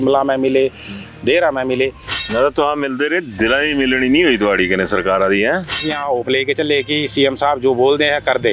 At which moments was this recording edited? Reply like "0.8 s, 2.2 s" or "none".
2.2 s, 5.8 s